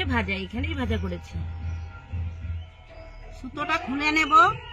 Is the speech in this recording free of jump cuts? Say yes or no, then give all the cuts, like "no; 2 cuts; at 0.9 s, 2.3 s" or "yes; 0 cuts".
no; 1 cut; at 2.7 s